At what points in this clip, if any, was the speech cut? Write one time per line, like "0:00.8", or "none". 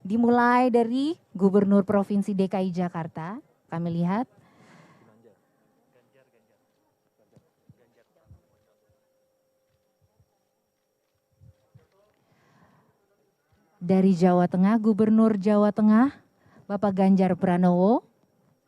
0:03.7